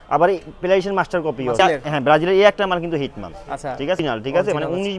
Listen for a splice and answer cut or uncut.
cut